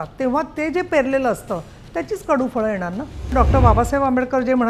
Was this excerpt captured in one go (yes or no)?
no